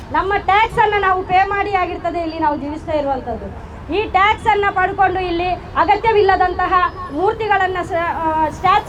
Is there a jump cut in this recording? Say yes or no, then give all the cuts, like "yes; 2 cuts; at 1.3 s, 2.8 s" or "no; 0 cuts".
no; 0 cuts